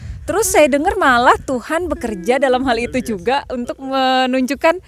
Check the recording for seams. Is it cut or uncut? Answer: uncut